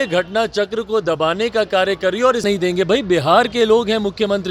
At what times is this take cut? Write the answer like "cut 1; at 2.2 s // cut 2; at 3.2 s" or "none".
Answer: cut 1; at 2.4 s